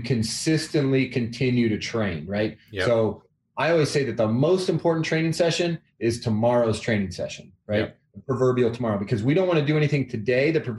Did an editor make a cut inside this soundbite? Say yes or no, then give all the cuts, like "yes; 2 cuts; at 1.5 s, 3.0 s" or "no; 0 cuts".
no; 0 cuts